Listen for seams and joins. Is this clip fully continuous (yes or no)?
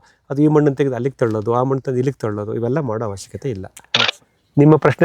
no